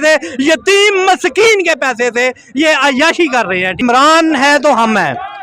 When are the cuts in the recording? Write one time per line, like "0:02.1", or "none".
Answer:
0:03.8